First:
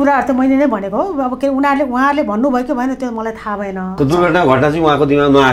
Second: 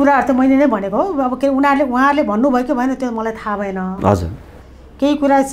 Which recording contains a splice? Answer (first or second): first